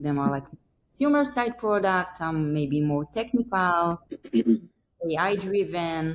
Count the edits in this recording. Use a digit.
0